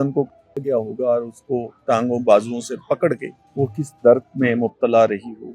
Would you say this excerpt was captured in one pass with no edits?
no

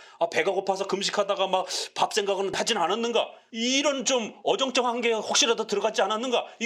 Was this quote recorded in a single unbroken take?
no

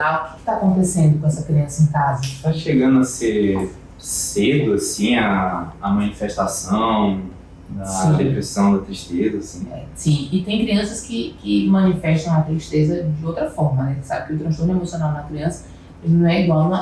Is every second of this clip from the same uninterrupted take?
yes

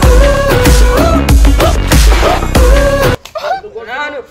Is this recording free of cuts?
no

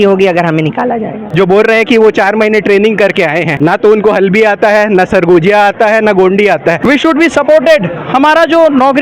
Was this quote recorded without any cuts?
no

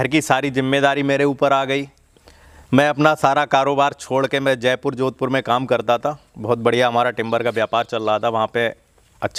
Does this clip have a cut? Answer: no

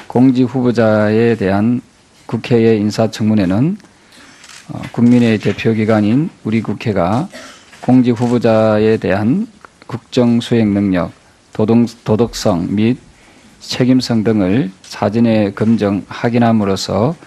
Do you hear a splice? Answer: no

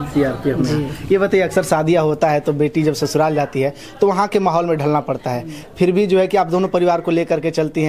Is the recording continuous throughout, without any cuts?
yes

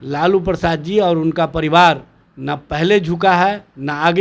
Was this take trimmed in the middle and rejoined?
no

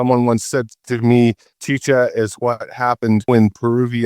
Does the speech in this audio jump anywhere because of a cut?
yes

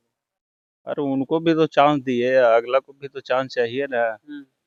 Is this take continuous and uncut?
yes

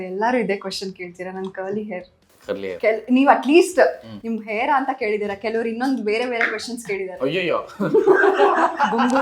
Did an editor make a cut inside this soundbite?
no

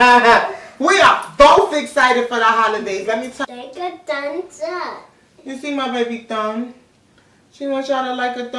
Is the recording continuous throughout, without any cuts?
no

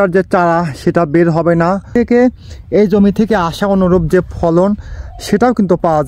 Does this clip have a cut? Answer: yes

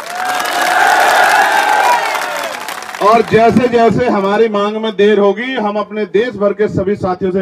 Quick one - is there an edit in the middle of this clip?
no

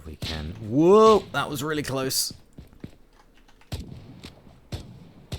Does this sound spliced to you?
no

